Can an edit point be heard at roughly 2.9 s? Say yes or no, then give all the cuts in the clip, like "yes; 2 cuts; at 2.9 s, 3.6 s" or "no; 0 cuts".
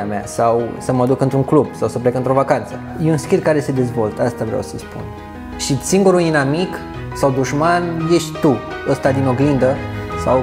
yes; 1 cut; at 2.9 s